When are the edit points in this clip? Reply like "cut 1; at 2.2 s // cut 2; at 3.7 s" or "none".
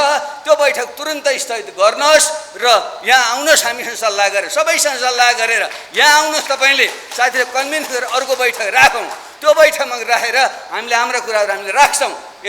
none

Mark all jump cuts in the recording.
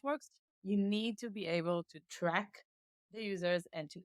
cut 1; at 2.0 s

